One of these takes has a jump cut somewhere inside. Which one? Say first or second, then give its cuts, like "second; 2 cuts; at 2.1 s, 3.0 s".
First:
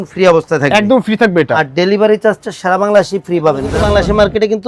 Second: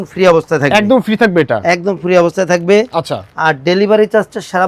first; 2 cuts; at 1.5 s, 3.7 s